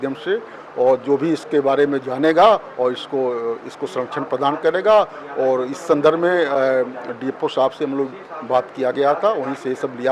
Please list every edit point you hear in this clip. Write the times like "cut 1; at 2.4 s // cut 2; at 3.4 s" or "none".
none